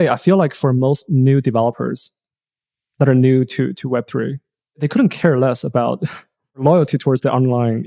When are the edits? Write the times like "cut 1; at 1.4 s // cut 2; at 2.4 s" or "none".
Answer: none

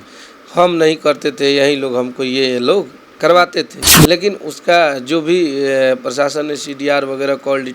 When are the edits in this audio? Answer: cut 1; at 3.8 s

